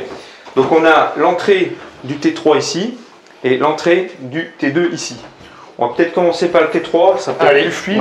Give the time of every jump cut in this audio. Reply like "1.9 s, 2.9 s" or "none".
none